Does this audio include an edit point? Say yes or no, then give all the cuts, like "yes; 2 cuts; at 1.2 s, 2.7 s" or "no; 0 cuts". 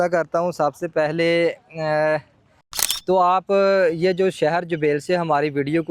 yes; 1 cut; at 2.8 s